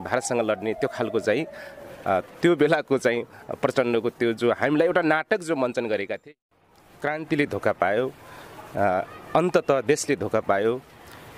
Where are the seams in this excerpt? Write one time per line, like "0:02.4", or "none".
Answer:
0:06.3